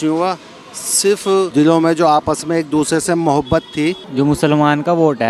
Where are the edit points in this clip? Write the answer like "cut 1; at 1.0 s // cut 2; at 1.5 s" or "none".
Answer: cut 1; at 1.5 s // cut 2; at 4.0 s